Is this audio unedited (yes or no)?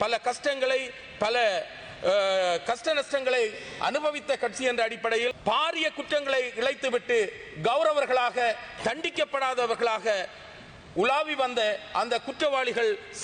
no